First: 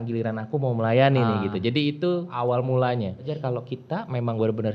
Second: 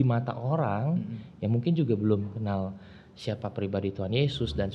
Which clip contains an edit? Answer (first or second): first